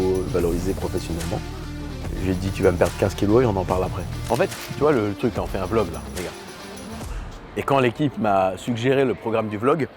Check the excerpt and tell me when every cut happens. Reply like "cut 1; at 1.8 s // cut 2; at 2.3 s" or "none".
cut 1; at 4.2 s